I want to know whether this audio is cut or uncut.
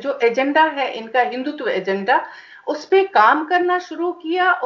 uncut